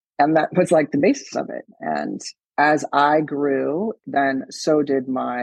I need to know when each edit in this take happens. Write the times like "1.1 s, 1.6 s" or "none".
4.0 s